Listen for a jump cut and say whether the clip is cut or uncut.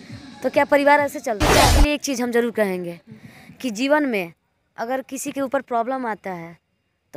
cut